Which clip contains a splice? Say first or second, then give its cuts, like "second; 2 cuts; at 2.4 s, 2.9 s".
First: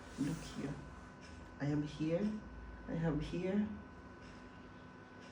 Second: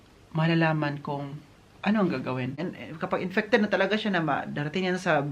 second; 1 cut; at 2.7 s